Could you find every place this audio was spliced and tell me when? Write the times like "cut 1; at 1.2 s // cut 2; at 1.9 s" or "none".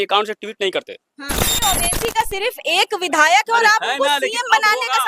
cut 1; at 1.5 s